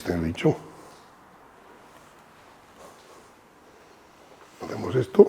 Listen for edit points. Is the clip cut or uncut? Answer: uncut